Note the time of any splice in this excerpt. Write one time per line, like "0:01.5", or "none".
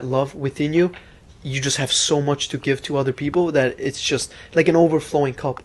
none